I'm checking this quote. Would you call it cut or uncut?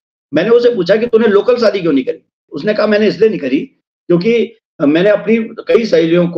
cut